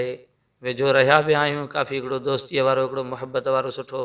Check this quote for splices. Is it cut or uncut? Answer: uncut